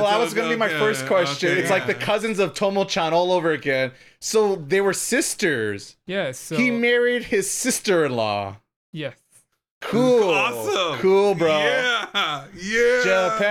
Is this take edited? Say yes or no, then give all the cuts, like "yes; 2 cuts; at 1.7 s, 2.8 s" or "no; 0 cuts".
no; 0 cuts